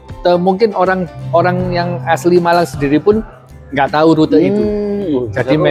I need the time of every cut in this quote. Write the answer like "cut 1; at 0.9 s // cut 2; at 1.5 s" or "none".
none

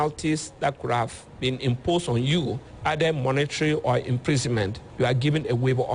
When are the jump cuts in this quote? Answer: cut 1; at 2.7 s // cut 2; at 4.8 s

